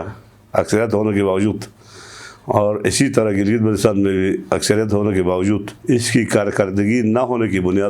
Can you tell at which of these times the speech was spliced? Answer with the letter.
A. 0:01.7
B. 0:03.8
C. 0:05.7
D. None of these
C